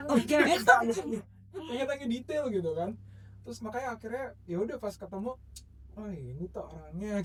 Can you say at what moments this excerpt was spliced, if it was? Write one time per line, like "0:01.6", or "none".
none